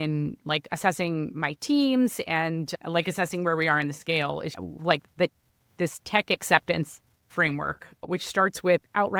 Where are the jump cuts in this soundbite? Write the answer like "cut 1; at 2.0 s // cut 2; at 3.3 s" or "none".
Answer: none

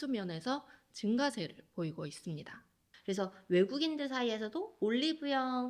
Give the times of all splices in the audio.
cut 1; at 2.9 s

